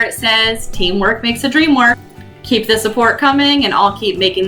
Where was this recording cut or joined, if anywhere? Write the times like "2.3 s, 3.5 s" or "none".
2.0 s